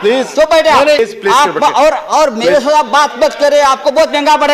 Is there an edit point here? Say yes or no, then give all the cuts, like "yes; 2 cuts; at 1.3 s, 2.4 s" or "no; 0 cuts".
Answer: yes; 1 cut; at 1.0 s